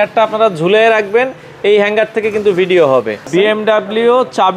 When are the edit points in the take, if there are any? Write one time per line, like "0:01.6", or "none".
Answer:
0:03.3